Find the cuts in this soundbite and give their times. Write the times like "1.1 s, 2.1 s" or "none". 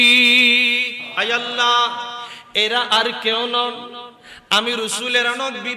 1.0 s